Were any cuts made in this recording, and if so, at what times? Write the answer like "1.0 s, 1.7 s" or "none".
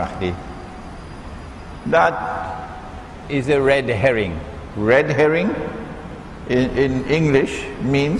2.5 s